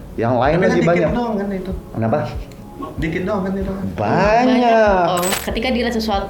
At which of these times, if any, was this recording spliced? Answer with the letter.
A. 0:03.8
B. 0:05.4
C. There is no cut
B